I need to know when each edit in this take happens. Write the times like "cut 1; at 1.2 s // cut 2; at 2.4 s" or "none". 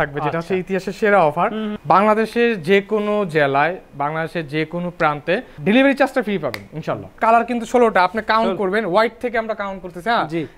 cut 1; at 1.7 s // cut 2; at 7.1 s